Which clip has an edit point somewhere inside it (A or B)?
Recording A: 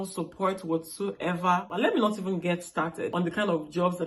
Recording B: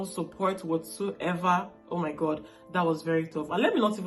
A